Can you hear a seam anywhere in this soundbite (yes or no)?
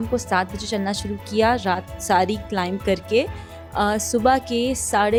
no